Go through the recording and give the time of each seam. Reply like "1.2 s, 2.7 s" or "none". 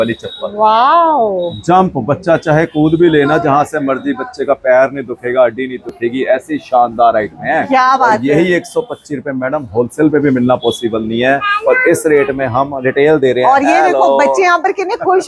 none